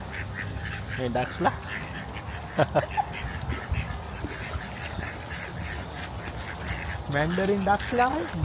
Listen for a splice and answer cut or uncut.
uncut